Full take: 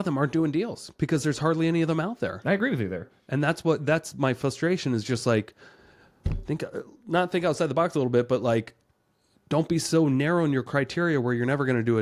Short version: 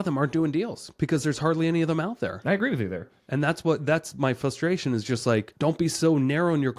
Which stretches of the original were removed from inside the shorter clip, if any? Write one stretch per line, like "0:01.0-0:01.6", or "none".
0:05.5-0:09.4